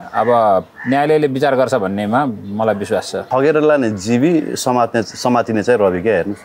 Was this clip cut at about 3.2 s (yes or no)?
yes